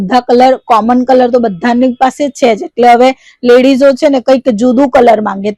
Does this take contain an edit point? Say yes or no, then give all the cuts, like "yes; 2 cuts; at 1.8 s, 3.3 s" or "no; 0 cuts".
no; 0 cuts